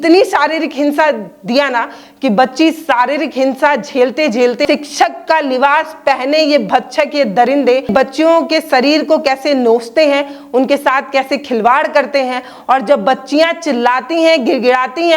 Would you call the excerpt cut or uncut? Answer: cut